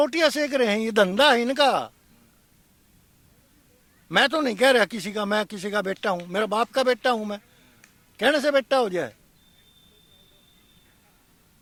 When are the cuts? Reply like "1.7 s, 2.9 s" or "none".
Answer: none

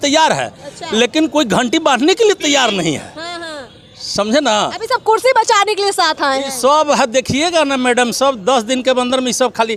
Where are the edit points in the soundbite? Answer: none

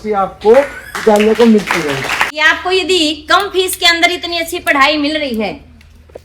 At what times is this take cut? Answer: 2.4 s

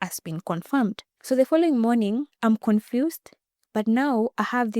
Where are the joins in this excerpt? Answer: 1.1 s, 2.3 s

